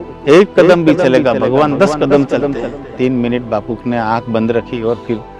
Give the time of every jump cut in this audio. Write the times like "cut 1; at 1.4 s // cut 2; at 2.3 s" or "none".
cut 1; at 2.8 s